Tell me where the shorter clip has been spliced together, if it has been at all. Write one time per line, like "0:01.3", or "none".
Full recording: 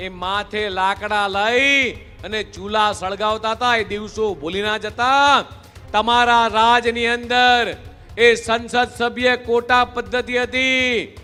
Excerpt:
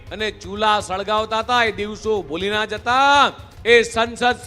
0:03.5

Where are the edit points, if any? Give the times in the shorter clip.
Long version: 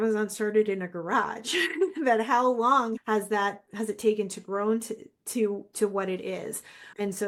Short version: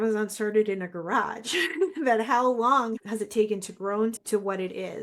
0:03.0
0:04.2

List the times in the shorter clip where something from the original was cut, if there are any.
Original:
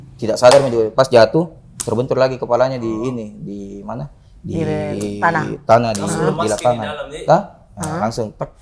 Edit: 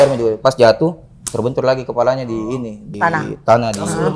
0:02.9

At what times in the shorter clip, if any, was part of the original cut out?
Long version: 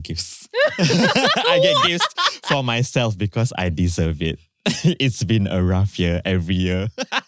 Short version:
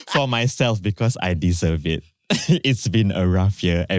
none

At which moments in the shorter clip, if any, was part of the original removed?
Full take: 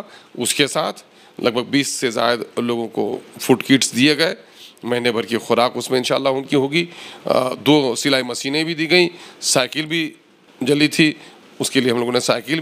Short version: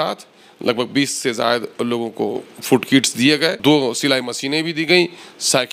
0:03.6

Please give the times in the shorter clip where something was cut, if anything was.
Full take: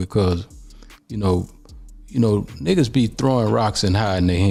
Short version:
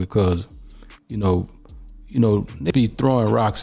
0:02.7

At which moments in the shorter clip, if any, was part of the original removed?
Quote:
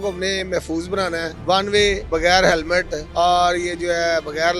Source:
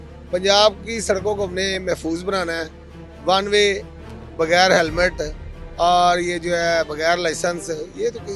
0:01.3
0:02.0
0:03.0

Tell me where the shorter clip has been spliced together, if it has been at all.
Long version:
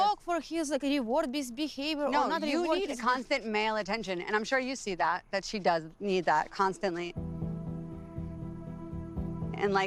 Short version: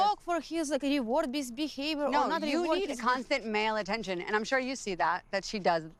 none

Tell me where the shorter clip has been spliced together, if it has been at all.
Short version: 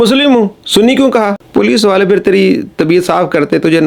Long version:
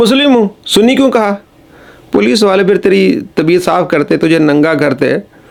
0:01.4

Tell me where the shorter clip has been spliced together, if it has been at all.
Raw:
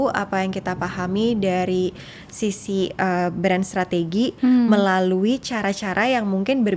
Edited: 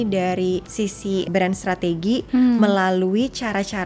0:01.2

